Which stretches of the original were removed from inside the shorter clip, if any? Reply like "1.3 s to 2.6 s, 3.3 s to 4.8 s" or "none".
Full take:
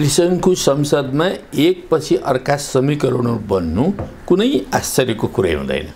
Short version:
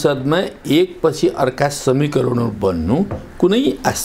none

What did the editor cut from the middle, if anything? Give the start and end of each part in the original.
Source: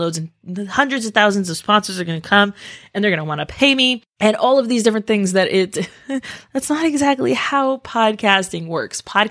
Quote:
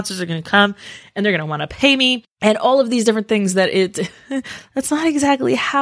none

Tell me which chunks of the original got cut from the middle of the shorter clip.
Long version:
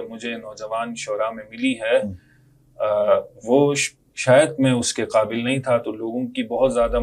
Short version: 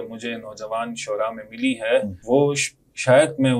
2.2 s to 3.4 s

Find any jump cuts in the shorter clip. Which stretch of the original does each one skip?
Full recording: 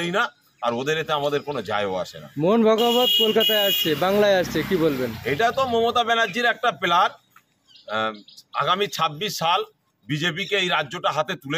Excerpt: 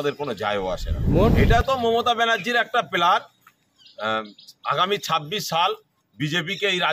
2.6 s to 5.2 s

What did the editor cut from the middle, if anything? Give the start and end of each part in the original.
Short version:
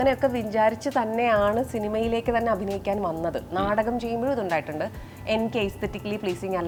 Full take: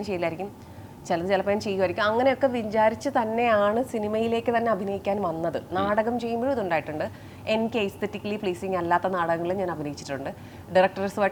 none

